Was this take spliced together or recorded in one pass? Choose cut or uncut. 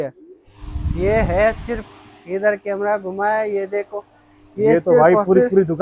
uncut